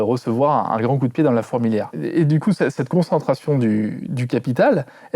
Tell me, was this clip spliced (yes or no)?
yes